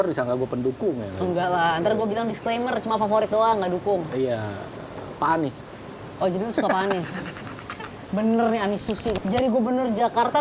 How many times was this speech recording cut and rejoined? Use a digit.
1